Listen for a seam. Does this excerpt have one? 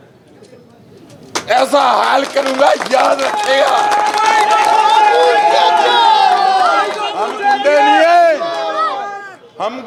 no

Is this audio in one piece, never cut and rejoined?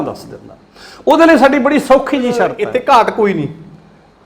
no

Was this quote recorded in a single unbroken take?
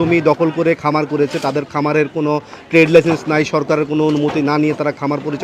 yes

